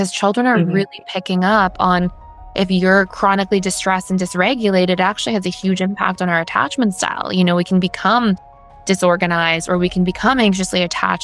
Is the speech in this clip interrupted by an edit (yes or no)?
no